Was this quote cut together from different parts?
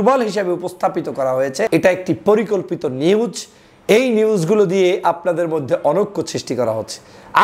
yes; 1 cut; at 1.7 s

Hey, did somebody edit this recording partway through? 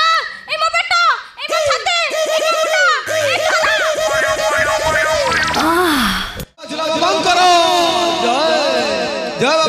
yes; 1 cut; at 6.8 s

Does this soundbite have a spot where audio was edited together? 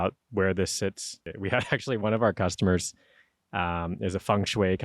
yes; 1 cut; at 1.2 s

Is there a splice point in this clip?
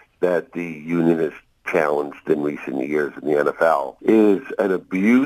yes; 1 cut; at 3.9 s

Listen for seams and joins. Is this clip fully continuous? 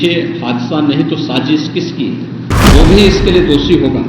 no; 1 cut; at 2.5 s

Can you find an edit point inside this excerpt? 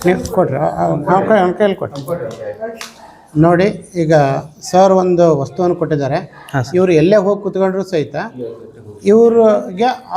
no; 0 cuts

